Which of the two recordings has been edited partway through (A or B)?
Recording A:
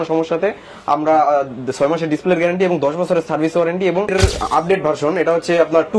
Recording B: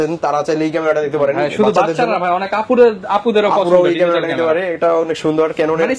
A